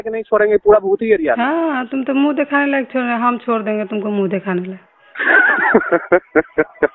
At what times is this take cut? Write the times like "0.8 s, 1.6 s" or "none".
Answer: none